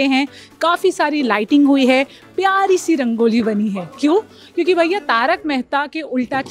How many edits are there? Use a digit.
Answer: 0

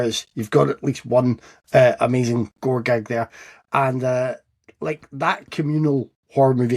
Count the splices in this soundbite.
0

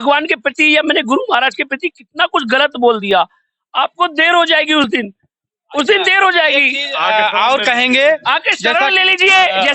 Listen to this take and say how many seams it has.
0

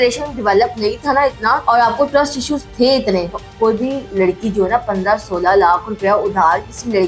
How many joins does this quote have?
2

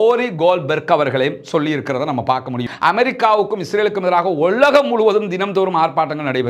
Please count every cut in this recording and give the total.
1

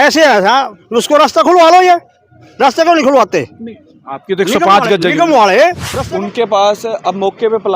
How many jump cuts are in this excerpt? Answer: 1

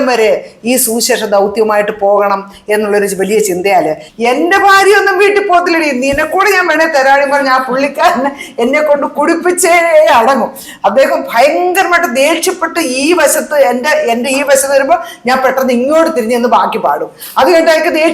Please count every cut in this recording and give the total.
1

